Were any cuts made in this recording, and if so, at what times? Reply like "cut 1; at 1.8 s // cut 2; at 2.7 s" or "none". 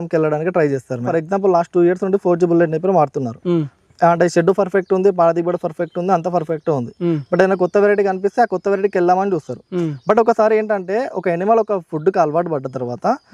cut 1; at 1.1 s